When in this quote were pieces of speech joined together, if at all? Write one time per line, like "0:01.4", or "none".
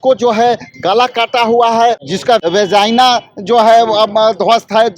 0:02.3